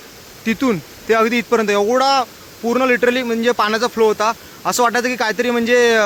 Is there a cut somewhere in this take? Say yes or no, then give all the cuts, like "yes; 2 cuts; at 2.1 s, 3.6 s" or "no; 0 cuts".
no; 0 cuts